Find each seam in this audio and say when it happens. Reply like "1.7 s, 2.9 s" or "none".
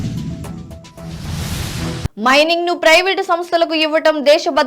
2.1 s